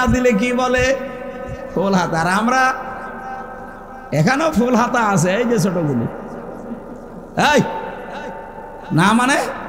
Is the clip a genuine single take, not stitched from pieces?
yes; 0 cuts

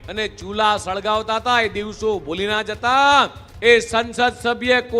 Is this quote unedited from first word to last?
no; 1 cut; at 3.4 s

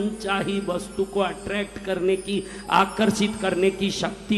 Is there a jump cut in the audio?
no; 0 cuts

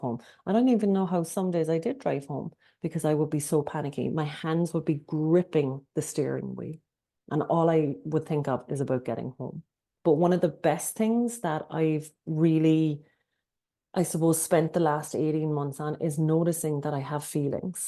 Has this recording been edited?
no; 0 cuts

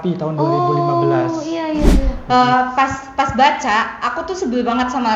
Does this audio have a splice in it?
yes; 1 cut; at 2.2 s

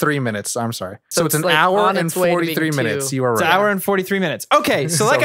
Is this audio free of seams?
no; 1 cut; at 1.1 s

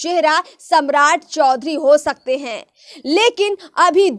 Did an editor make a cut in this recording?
no; 0 cuts

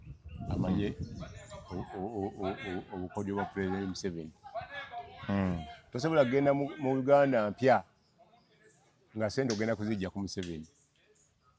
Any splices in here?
no; 0 cuts

